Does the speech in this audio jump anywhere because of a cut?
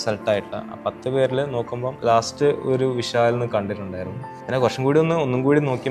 yes; 2 cuts; at 1.8 s, 4.3 s

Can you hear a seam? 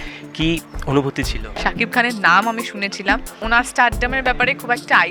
yes; 2 cuts; at 1.5 s, 3.4 s

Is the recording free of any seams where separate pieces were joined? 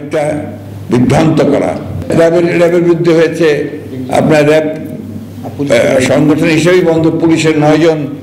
no; 1 cut; at 1.9 s

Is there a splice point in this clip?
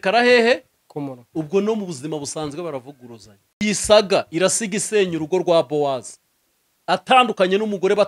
yes; 1 cut; at 3.6 s

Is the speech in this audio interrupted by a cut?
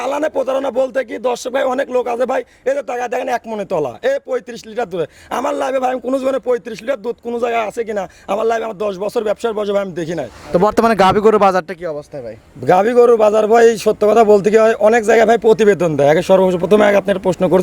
yes; 1 cut; at 10.3 s

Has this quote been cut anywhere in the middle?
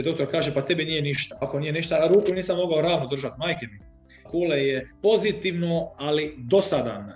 yes; 3 cuts; at 1.3 s, 4.2 s, 4.9 s

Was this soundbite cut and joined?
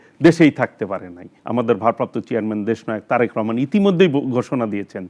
yes; 1 cut; at 1.3 s

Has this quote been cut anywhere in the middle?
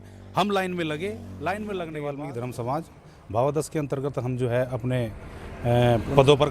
yes; 1 cut; at 2.2 s

